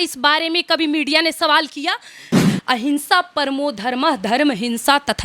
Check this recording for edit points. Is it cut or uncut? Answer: cut